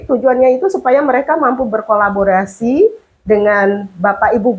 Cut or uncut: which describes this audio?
uncut